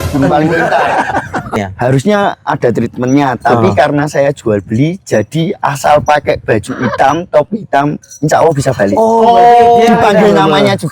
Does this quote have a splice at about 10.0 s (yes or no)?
no